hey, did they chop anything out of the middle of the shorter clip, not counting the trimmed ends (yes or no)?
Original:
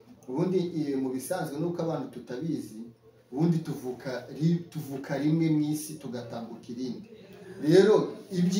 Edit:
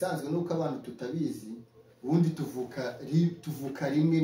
no